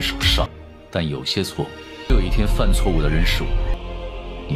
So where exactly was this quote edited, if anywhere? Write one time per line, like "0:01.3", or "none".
none